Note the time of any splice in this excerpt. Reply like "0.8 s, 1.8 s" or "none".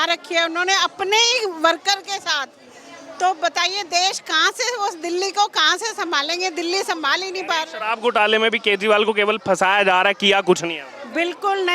none